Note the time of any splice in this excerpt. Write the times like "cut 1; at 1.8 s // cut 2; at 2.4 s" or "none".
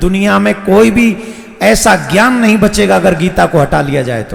none